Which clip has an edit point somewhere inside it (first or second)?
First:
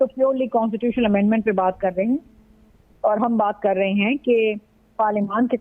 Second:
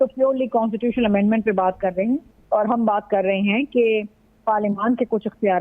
second